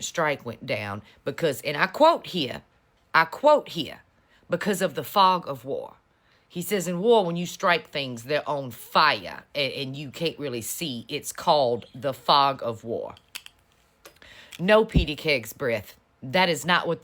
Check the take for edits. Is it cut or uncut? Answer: uncut